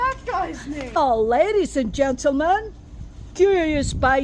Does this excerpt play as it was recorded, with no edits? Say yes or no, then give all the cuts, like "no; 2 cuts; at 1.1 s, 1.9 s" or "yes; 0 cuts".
no; 1 cut; at 1.0 s